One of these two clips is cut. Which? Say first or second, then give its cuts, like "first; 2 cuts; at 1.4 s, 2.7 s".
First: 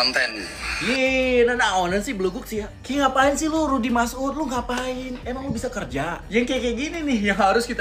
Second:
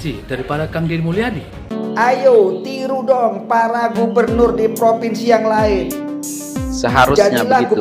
second; 1 cut; at 1.7 s